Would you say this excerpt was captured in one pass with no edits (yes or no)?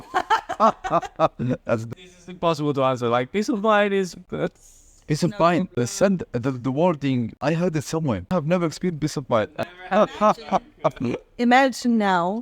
no